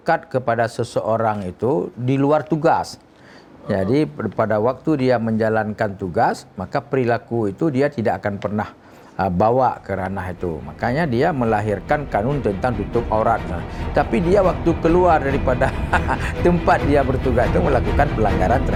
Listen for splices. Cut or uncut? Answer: uncut